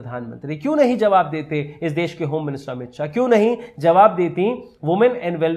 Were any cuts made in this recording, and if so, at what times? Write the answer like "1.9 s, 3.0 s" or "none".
none